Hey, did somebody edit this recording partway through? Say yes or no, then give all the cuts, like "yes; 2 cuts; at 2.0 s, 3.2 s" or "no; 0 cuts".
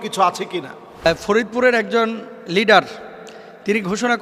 yes; 1 cut; at 1.1 s